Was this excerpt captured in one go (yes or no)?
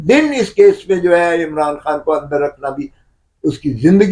yes